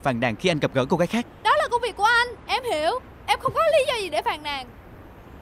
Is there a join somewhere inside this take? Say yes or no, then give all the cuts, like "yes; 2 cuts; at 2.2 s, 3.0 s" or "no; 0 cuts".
yes; 1 cut; at 1.3 s